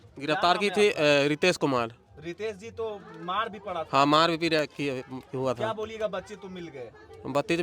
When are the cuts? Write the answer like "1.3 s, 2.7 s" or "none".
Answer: none